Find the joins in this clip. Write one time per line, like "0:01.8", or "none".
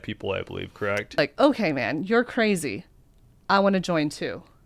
0:01.2